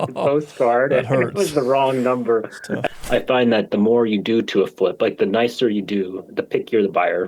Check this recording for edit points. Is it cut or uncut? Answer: cut